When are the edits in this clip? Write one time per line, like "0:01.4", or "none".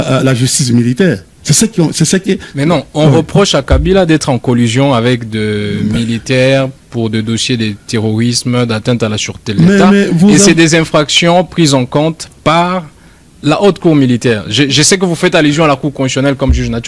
none